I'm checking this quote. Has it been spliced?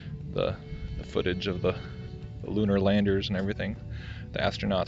no; 0 cuts

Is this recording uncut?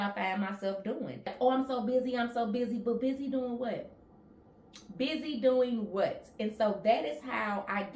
no; 1 cut; at 1.3 s

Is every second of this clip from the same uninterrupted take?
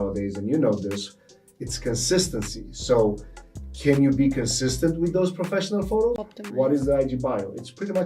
no; 1 cut; at 6.2 s

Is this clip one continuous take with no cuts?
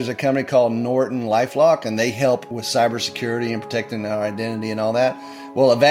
no; 1 cut; at 2.5 s

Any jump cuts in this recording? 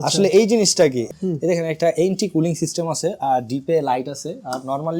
yes; 1 cut; at 1.0 s

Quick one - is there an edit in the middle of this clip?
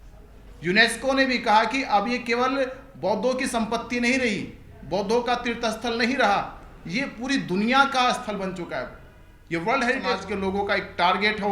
yes; 1 cut; at 10.1 s

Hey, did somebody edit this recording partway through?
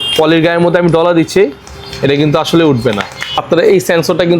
yes; 1 cut; at 3.4 s

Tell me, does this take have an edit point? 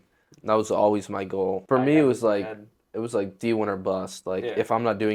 no; 0 cuts

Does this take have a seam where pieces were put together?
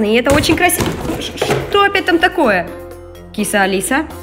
no; 0 cuts

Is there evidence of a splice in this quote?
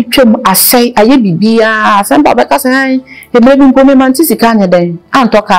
no; 0 cuts

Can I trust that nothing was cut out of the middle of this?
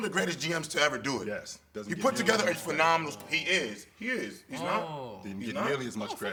yes; 0 cuts

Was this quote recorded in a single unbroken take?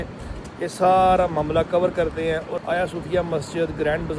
no; 1 cut; at 2.6 s

